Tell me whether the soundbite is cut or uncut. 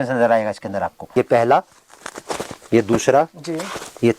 cut